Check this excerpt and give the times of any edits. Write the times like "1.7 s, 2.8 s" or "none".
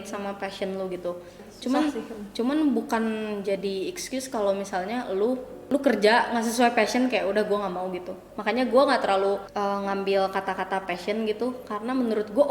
1.5 s, 5.5 s, 9.5 s